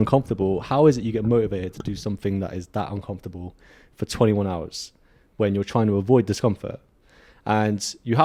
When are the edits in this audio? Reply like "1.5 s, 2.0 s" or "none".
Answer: none